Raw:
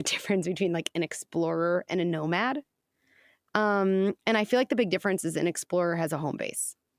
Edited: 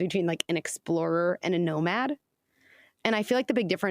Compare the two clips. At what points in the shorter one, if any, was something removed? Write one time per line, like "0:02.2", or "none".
0:03.0